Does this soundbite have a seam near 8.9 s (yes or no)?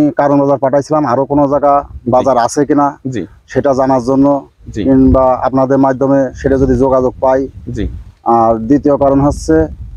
no